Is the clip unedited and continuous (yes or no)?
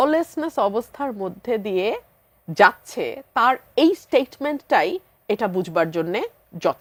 yes